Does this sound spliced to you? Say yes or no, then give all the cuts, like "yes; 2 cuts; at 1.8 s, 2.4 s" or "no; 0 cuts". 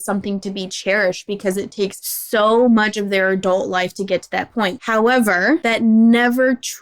yes; 3 cuts; at 2.1 s, 4.8 s, 5.6 s